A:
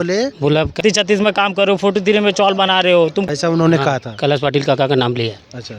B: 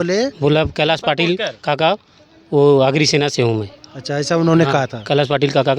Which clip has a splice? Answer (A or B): A